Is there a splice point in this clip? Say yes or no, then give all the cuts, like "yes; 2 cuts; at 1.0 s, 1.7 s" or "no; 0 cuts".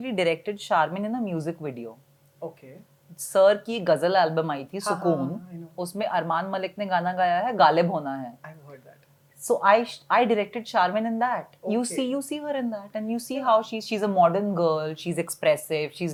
no; 0 cuts